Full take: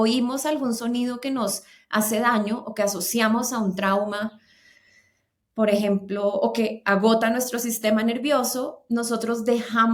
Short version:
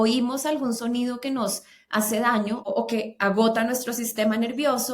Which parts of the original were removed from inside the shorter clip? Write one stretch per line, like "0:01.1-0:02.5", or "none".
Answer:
0:02.7-0:06.3